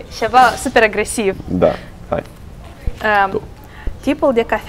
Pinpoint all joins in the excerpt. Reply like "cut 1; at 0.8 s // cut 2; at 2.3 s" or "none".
none